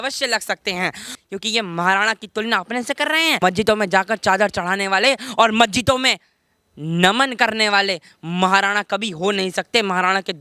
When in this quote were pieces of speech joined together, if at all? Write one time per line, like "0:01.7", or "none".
0:01.0
0:03.4